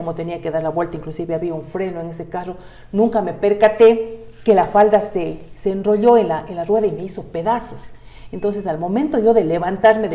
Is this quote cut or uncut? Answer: uncut